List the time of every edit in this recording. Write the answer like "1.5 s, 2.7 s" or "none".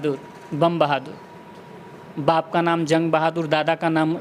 none